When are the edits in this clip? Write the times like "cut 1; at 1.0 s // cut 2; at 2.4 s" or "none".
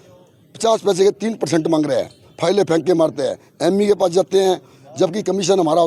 none